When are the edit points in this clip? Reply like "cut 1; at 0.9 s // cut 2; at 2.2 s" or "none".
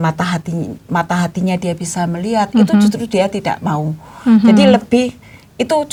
none